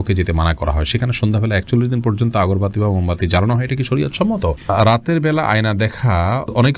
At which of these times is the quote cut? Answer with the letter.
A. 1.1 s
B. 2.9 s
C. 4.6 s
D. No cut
C